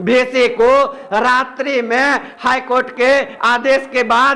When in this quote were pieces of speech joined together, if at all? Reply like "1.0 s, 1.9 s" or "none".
none